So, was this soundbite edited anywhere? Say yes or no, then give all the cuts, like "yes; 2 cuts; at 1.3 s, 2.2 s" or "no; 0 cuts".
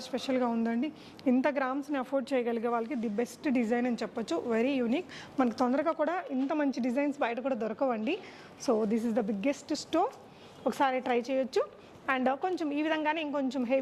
no; 0 cuts